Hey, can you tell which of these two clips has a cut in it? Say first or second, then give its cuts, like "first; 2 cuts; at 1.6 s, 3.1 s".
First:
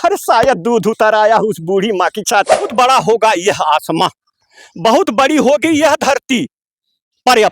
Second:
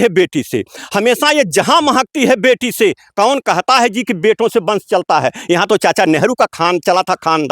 first; 1 cut; at 2.6 s